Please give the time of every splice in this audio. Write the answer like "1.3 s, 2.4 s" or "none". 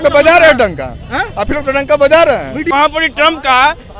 2.7 s